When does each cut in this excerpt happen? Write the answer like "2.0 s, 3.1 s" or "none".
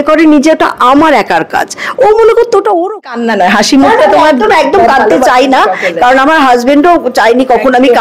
3.0 s